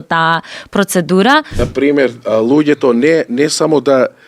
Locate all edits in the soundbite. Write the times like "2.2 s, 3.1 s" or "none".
1.5 s

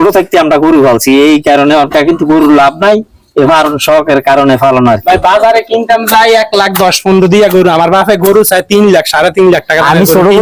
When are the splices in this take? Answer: none

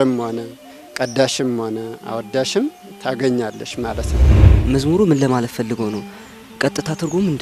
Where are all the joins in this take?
4.4 s

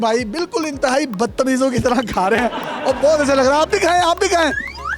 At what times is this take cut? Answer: none

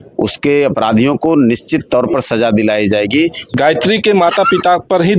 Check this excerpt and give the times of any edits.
3.4 s

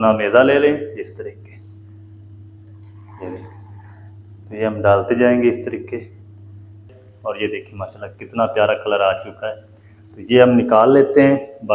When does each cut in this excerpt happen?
6.9 s

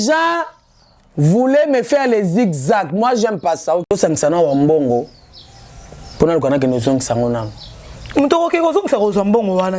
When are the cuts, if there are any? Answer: 3.9 s

